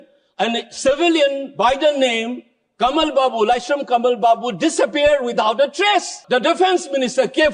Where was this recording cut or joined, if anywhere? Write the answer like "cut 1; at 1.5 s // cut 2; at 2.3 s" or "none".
cut 1; at 6.2 s